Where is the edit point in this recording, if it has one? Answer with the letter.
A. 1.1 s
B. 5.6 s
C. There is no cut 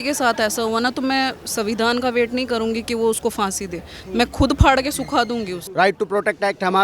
B